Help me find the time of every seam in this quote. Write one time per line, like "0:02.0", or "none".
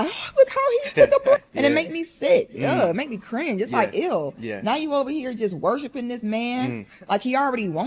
0:06.9